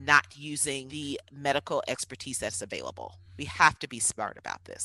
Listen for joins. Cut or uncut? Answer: cut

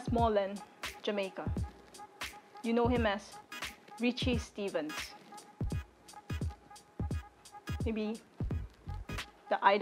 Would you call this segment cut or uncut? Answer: uncut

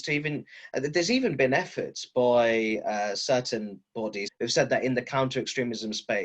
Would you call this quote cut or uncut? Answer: cut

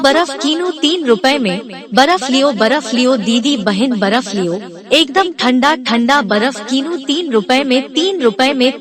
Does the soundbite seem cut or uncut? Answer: uncut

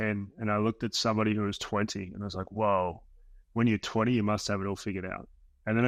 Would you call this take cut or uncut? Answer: uncut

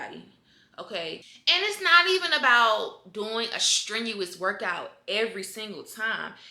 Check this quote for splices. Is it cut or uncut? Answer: cut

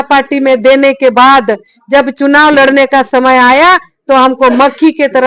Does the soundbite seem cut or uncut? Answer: uncut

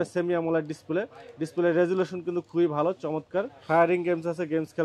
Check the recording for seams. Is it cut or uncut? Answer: cut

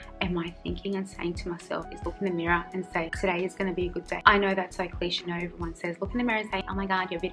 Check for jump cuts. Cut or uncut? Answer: cut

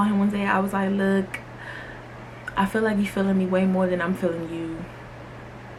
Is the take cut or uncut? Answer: uncut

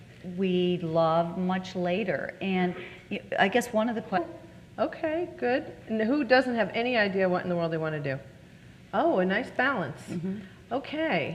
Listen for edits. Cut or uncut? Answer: uncut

